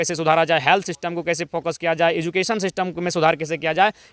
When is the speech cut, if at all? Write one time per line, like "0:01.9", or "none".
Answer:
none

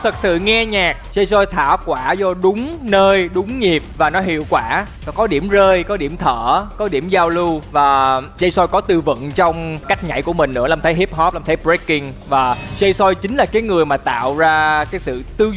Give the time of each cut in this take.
none

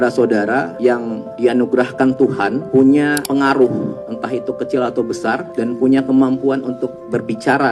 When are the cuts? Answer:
0:00.9
0:02.6
0:03.2
0:04.1
0:05.5

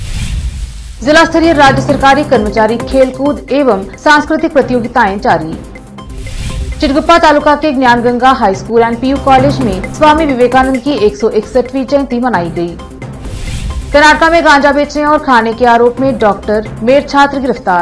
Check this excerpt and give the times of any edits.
0:00.9

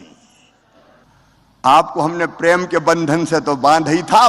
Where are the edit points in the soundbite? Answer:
0:01.0

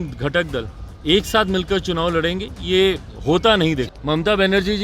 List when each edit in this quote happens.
0:03.9

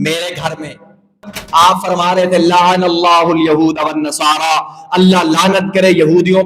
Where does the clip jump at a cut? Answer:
0:01.3

